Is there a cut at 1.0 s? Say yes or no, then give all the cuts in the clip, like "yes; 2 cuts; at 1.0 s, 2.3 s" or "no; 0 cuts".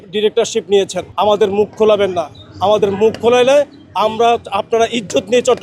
yes; 1 cut; at 1.0 s